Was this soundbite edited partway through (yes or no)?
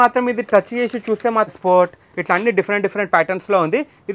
yes